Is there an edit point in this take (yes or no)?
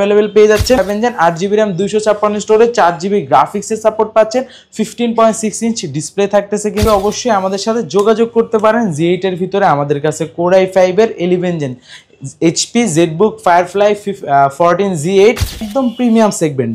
yes